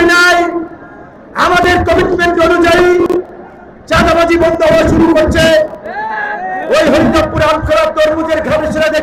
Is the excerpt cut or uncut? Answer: uncut